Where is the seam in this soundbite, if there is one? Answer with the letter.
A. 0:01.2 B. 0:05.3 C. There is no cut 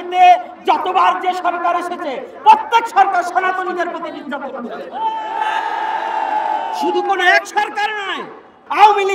C